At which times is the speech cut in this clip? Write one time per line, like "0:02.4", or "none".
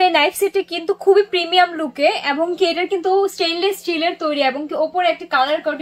none

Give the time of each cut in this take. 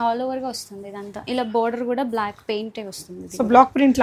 none

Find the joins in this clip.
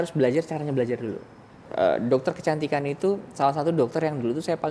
0:01.7

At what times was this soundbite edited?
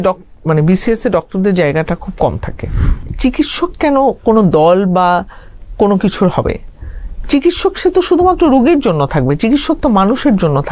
0:03.1

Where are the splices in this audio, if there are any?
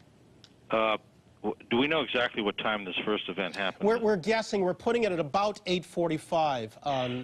0:04.8

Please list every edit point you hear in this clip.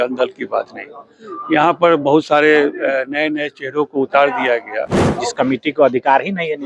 0:05.1

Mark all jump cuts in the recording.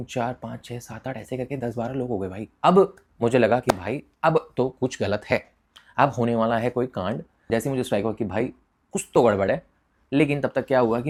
none

